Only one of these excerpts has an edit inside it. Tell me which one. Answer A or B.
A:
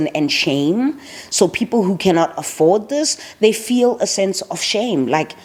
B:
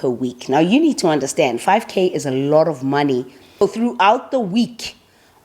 B